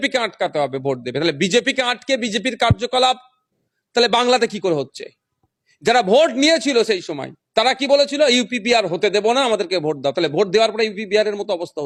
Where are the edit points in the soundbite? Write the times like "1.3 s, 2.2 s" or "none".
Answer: none

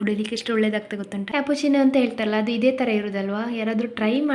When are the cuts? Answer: 1.3 s

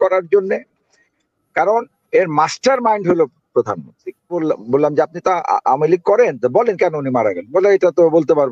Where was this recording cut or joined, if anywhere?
4.3 s

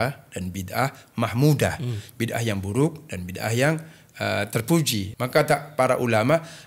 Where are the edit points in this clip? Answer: 5.1 s

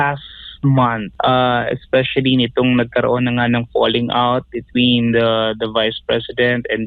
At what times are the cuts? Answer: 1.1 s

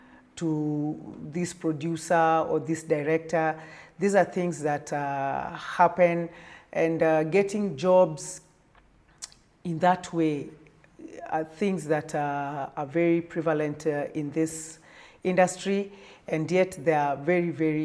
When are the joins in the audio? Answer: none

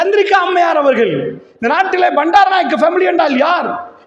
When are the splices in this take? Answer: 1.0 s

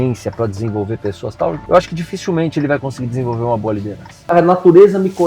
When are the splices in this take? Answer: 1.6 s, 4.3 s

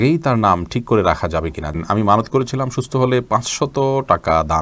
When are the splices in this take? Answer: 1.8 s

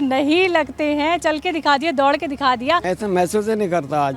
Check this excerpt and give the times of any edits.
2.8 s

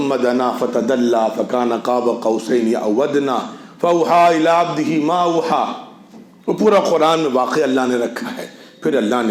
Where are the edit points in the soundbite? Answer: none

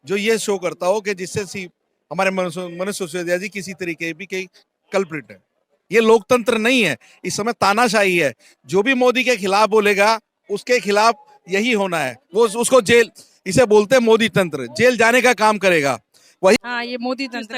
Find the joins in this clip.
5.8 s, 16.6 s

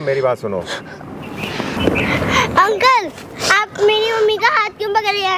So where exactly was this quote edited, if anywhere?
1.8 s

